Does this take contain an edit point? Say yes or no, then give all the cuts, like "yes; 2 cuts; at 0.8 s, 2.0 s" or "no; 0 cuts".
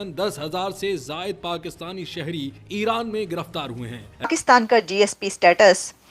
yes; 1 cut; at 4.3 s